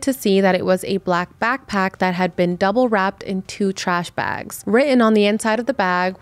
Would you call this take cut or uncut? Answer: cut